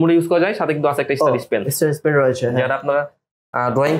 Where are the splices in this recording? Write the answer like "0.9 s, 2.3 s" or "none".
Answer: none